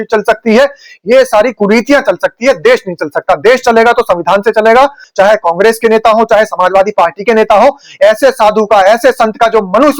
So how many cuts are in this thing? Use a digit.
1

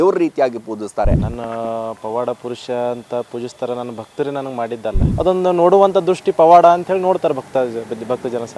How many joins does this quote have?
2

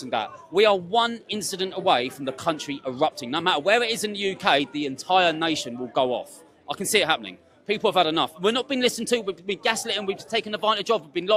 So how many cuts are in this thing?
0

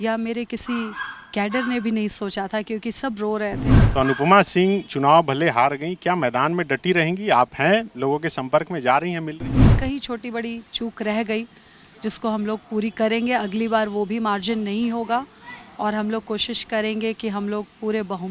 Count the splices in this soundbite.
2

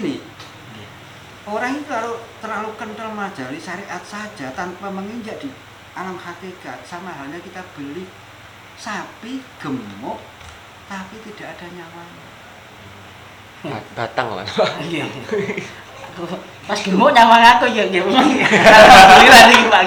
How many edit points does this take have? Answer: 0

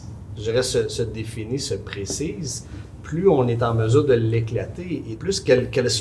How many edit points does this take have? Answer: 1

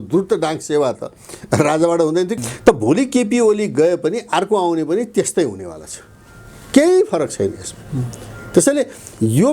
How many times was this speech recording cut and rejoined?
1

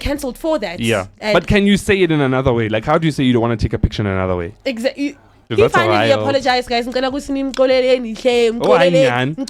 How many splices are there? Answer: 2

